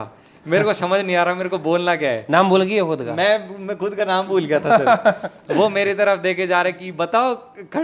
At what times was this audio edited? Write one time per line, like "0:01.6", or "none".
none